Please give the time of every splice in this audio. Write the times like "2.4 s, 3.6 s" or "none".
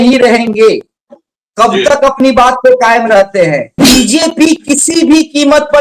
3.8 s